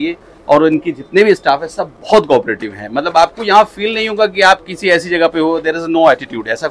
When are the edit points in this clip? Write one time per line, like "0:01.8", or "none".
none